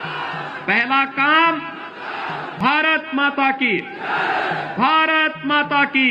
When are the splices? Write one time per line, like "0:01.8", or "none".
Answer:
0:02.5

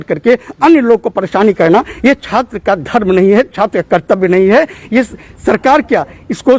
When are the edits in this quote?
none

